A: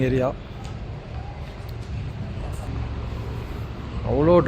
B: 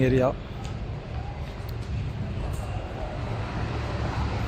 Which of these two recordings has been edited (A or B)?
A